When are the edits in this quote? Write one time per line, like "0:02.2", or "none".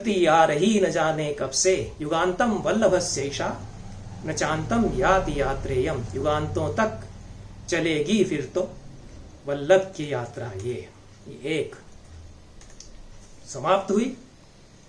none